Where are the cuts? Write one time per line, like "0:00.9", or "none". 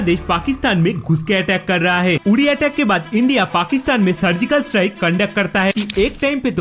0:02.2
0:05.7